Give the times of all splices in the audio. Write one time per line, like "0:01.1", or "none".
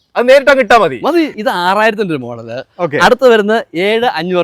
0:01.4

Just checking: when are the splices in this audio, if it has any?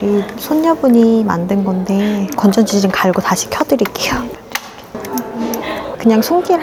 none

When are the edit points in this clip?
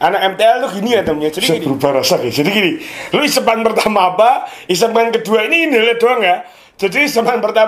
0:01.4

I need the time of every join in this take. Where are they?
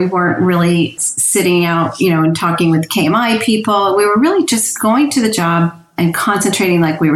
0:00.9

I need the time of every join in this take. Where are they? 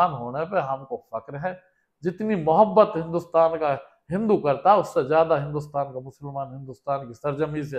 none

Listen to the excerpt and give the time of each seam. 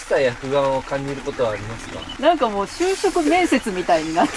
0:02.1

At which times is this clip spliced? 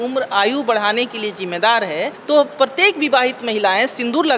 0:02.4

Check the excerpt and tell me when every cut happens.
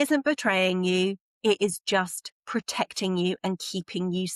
none

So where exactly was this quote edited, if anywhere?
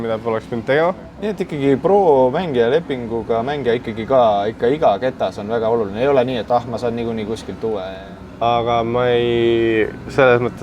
0:01.1
0:08.0

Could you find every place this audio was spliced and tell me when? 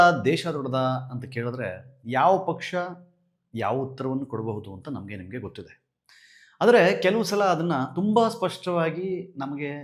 none

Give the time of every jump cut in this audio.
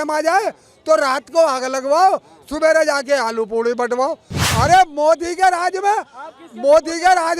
0:04.4

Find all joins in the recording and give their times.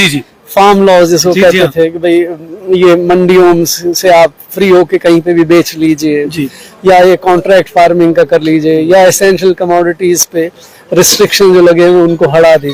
none

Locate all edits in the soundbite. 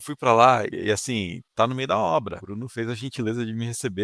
0:01.3
0:02.4

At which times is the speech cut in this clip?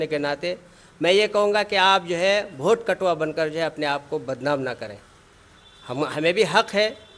none

